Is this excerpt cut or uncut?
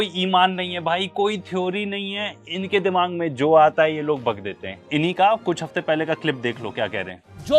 uncut